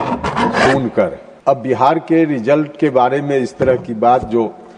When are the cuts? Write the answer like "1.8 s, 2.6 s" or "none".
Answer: 1.3 s